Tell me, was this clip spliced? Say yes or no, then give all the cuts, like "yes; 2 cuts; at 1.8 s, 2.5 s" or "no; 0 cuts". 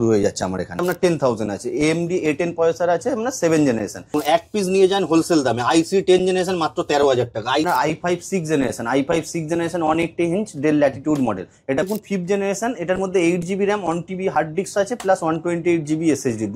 yes; 4 cuts; at 1.0 s, 4.1 s, 7.7 s, 11.9 s